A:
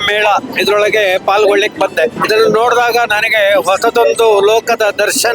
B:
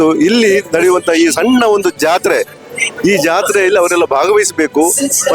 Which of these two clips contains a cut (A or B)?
A